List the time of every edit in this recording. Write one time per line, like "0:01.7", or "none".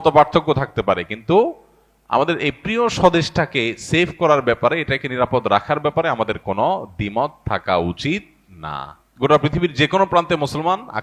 0:09.0